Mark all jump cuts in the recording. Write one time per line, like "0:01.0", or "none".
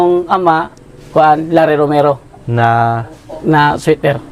none